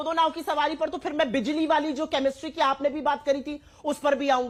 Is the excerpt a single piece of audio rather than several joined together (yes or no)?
yes